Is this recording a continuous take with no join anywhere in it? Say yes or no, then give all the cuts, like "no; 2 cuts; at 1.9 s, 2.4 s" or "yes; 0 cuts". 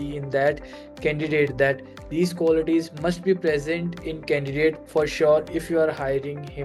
yes; 0 cuts